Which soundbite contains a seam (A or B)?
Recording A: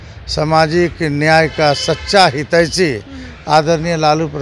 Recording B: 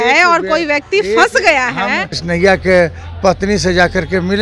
B